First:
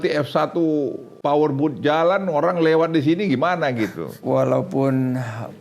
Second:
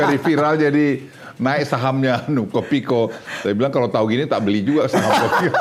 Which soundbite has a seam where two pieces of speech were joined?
first; 2 cuts; at 1.1 s, 4.1 s

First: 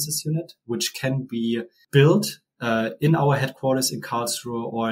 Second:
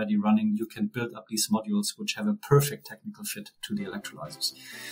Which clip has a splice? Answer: first; 1 cut; at 1.8 s

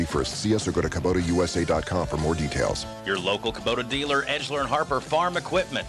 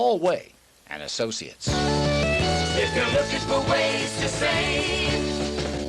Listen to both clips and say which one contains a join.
second; 1 cut; at 1.5 s

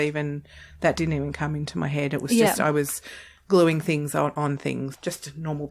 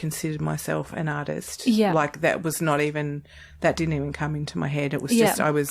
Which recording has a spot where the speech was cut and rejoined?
first; 1 cut; at 4.5 s

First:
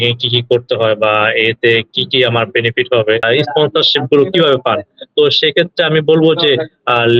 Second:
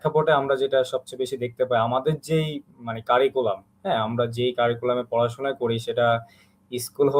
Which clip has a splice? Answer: first; 1 cut; at 3.2 s

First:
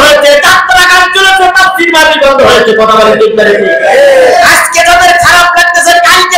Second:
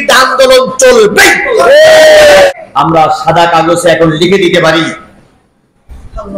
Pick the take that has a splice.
second; 1 cut; at 2.5 s

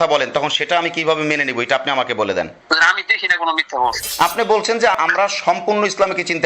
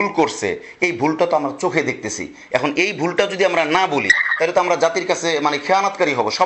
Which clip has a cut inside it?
first; 3 cuts; at 2.6 s, 4.0 s, 5.0 s

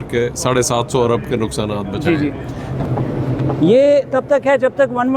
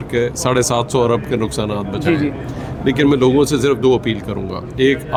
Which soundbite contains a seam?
first; 1 cut; at 2.7 s

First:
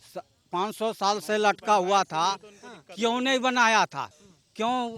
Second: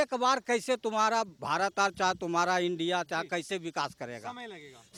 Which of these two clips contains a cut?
first; 1 cut; at 4.1 s

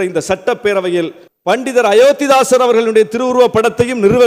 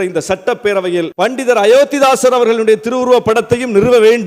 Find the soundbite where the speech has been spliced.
second; 1 cut; at 1.1 s

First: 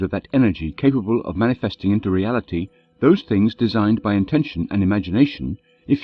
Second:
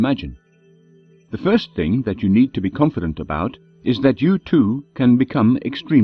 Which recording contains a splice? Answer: second; 1 cut; at 4.1 s

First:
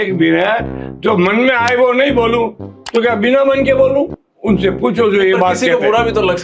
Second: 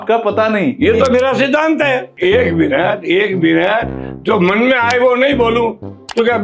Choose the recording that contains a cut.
second; 1 cut; at 2.1 s

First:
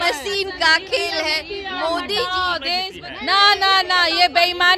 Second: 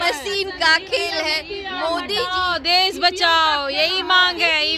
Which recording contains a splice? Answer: first; 1 cut; at 2.8 s

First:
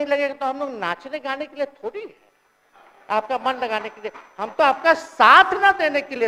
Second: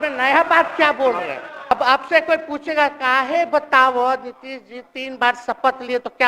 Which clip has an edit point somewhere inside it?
second; 1 cut; at 1.7 s

